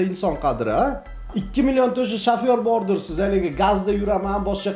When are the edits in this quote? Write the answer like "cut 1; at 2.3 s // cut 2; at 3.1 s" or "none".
none